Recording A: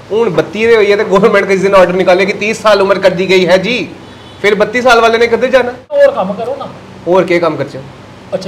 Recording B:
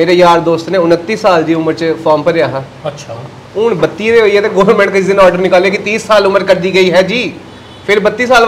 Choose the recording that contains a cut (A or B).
A